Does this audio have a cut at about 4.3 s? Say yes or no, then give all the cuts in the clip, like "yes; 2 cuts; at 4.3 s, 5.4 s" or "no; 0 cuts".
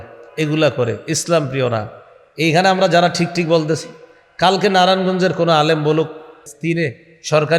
no; 1 cut; at 6.5 s